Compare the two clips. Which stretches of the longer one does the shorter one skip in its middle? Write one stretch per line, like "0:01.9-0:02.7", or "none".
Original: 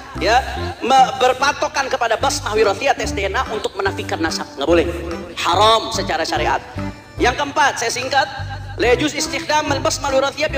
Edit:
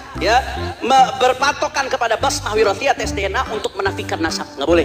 none

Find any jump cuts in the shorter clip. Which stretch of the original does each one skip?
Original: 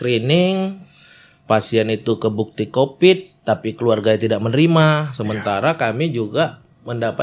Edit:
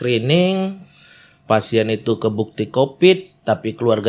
none

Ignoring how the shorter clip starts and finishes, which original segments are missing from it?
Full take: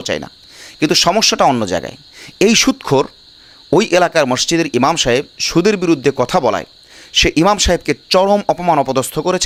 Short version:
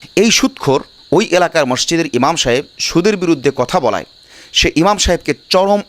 0:03.2-0:03.5

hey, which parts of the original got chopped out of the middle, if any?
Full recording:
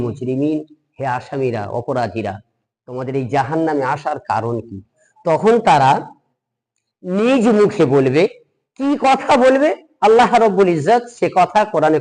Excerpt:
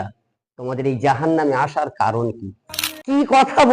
0:05.1-0:08.5

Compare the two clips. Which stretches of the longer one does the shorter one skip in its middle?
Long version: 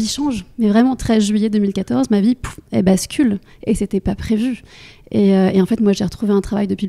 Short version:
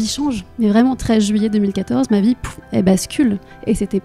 none

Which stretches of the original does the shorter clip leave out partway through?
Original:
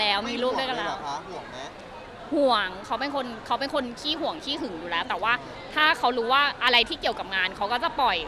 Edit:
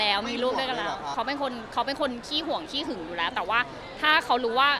0:01.1-0:02.9

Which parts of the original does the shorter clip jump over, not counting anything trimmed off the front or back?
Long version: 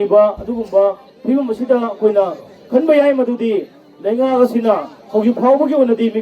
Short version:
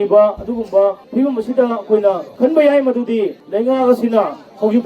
0:01.0-0:01.2
0:02.4-0:02.6
0:03.7-0:03.9

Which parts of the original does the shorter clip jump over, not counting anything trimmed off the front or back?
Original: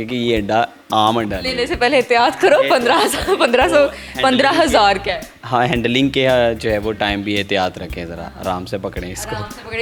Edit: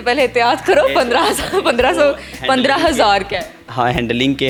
none

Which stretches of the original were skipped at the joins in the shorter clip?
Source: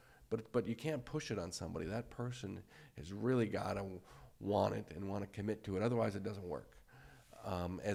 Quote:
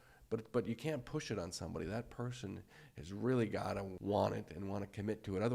0:03.9-0:04.3

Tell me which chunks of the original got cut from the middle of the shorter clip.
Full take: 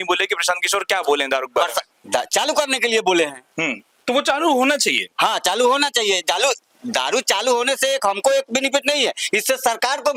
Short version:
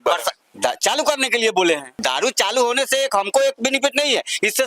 0:03.4-0:06.8

